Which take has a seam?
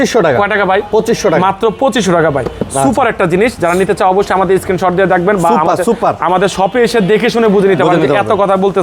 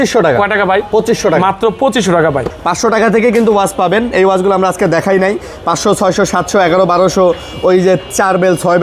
second; 1 cut; at 2.5 s

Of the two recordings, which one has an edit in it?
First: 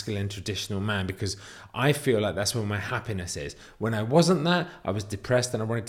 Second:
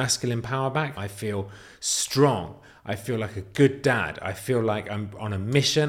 second; 1 cut; at 1.0 s

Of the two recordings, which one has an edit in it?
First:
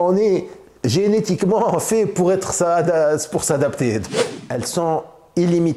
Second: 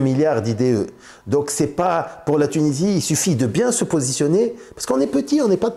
first; 1 cut; at 4.0 s

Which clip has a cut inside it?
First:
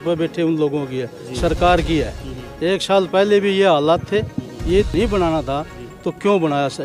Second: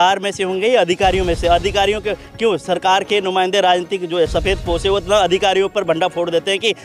first; 1 cut; at 4.9 s

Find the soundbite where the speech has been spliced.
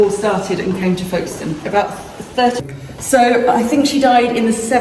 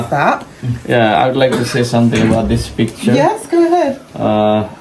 first; 1 cut; at 2.6 s

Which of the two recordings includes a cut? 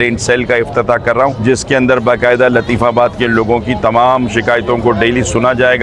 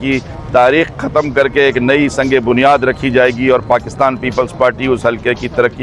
first; 1 cut; at 1.4 s

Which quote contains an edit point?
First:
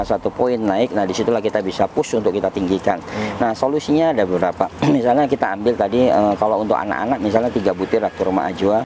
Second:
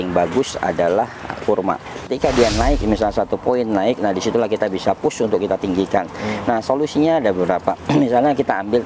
second; 1 cut; at 2.1 s

